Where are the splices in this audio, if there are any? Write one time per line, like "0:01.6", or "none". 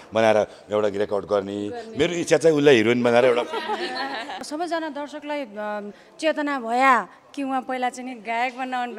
0:04.4